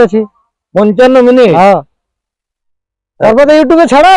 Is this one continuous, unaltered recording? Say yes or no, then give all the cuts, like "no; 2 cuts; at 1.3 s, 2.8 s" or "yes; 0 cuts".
yes; 0 cuts